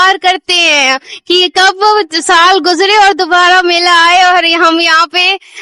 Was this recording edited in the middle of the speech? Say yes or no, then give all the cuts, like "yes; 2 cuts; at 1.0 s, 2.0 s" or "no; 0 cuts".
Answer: no; 0 cuts